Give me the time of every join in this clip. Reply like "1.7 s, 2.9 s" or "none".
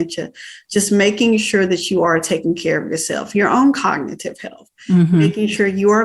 none